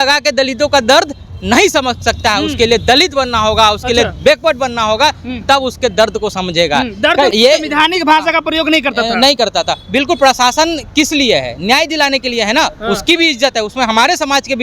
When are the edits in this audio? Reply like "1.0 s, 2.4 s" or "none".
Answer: 7.3 s